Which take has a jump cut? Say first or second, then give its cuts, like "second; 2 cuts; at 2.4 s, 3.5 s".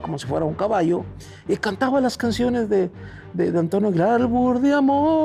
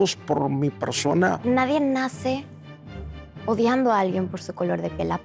second; 1 cut; at 1.5 s